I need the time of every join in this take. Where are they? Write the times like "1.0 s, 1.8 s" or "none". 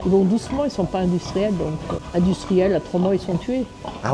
1.9 s